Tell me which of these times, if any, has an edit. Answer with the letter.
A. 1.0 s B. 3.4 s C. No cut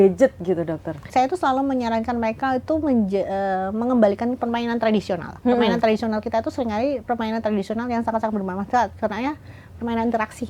A